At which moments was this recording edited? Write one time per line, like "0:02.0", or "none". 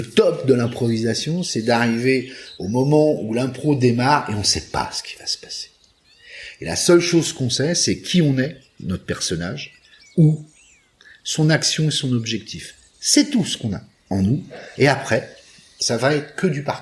0:15.7